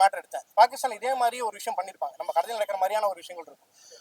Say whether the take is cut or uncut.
uncut